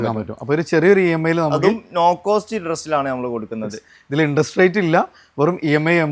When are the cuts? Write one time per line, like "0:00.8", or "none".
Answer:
none